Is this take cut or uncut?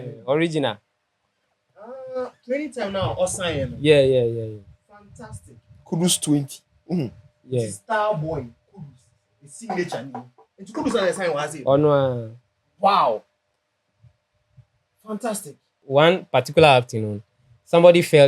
cut